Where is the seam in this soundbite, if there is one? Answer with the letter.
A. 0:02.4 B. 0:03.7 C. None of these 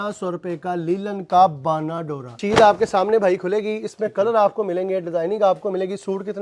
A